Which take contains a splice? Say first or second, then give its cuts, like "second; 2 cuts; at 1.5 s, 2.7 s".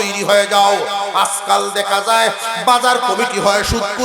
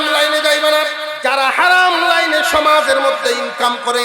second; 1 cut; at 1.1 s